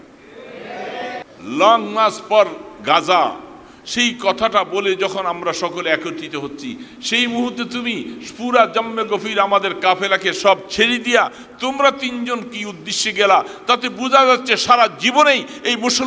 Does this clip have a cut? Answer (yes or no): yes